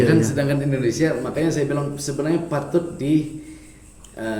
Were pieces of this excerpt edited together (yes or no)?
no